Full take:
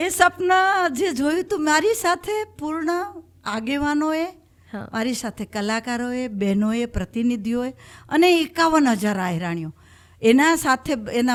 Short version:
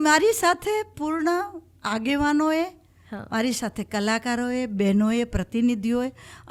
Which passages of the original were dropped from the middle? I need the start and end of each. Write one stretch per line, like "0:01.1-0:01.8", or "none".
none